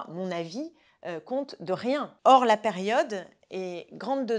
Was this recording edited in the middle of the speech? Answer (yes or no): yes